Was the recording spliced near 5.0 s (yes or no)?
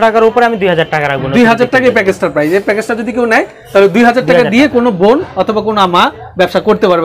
no